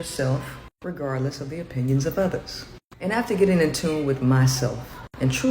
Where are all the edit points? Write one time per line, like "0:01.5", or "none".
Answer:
0:02.7